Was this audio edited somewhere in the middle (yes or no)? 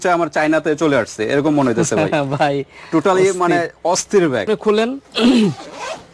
yes